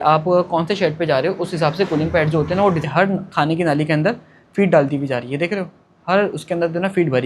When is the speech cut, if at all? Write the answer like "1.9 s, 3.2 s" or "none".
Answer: 2.8 s